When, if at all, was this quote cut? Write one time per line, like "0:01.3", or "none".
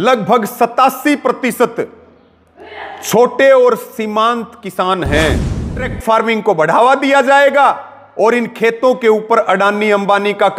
0:05.9